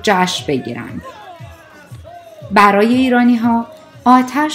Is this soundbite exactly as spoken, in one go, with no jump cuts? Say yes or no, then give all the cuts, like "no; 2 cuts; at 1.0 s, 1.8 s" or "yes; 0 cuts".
yes; 0 cuts